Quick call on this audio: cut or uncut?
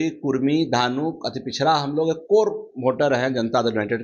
uncut